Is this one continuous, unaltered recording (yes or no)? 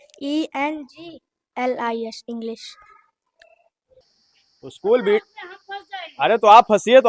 no